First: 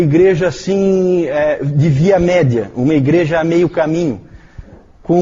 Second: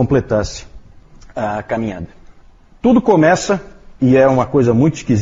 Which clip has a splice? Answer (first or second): first